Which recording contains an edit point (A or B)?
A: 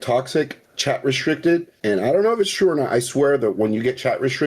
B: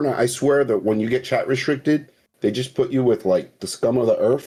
A